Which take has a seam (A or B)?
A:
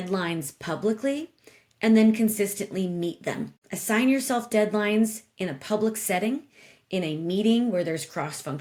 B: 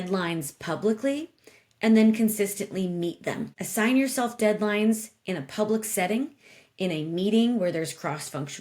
B